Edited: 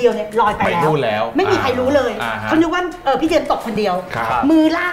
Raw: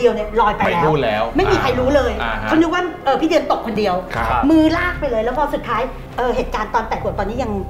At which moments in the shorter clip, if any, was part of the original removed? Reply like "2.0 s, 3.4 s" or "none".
none